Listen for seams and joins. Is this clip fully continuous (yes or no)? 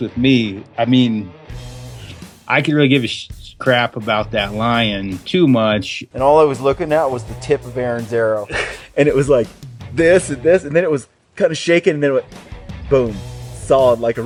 yes